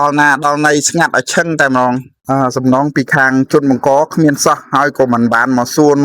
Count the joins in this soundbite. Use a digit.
1